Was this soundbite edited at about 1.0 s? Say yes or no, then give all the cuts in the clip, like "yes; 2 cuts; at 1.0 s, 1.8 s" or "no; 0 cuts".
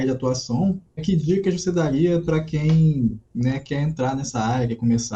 yes; 1 cut; at 1.0 s